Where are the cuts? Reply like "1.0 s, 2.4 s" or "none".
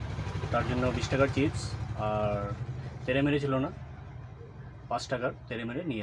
none